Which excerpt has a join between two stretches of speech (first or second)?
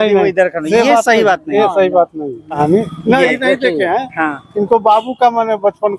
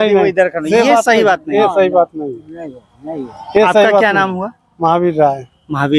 first